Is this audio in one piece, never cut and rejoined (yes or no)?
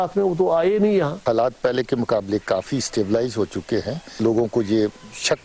no